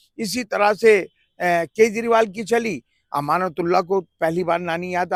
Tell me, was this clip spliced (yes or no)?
no